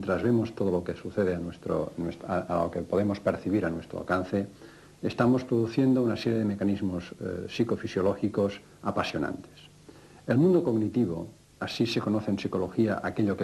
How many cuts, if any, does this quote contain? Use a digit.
1